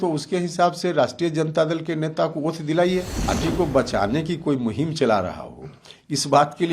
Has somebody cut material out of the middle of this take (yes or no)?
yes